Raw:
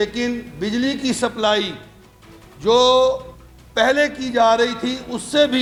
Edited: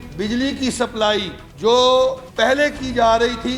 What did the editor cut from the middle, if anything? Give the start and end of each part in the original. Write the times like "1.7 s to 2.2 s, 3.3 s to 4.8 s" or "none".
1.8 s to 2.4 s, 3.3 s to 3.6 s